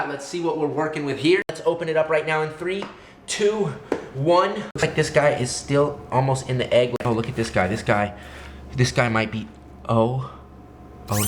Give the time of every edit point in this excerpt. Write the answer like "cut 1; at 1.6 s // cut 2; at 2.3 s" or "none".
cut 1; at 1.6 s // cut 2; at 4.8 s // cut 3; at 6.9 s